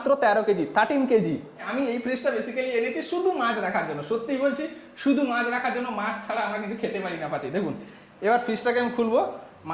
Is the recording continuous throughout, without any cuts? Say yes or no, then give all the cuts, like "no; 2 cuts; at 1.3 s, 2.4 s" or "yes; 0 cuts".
no; 1 cut; at 1.6 s